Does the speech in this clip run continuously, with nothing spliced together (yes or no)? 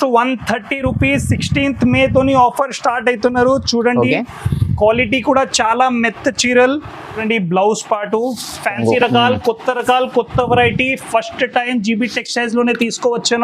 no